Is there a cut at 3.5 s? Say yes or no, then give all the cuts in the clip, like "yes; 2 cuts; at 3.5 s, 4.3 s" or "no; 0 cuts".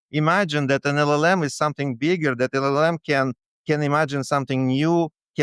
no; 0 cuts